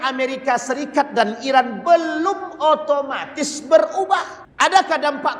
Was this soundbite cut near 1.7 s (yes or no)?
no